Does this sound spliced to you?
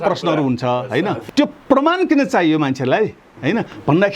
yes; 1 cut; at 1.2 s

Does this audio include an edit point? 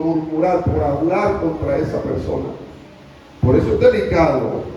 no; 0 cuts

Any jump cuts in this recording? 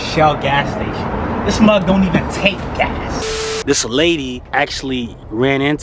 yes; 2 cuts; at 3.2 s, 4.4 s

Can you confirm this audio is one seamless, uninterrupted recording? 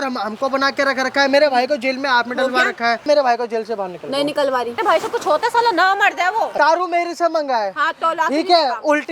no; 3 cuts; at 3.1 s, 4.8 s, 6.5 s

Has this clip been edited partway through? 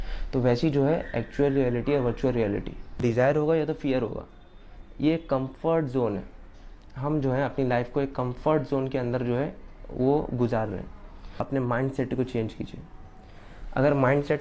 yes; 2 cuts; at 3.0 s, 11.5 s

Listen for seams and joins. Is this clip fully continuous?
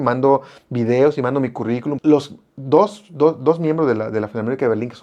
no; 1 cut; at 2.0 s

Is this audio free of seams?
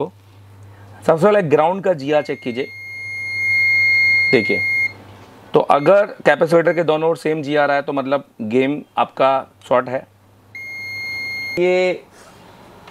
no; 1 cut; at 11.6 s

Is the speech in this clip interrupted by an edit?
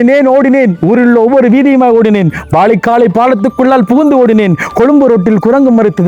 no; 0 cuts

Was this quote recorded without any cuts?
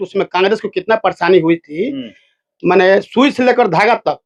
yes; 0 cuts

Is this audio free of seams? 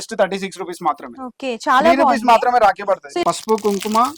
no; 1 cut; at 3.1 s

